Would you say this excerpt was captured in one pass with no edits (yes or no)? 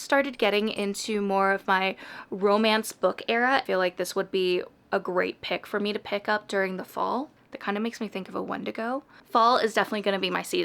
no